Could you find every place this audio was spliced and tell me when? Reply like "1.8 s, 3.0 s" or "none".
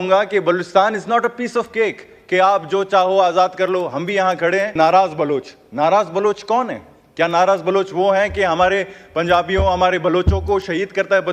4.7 s